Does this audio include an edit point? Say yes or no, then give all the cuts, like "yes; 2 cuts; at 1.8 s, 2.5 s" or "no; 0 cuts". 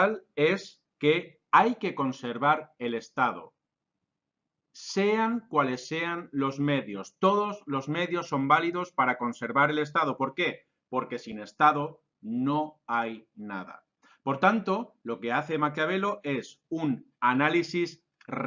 no; 0 cuts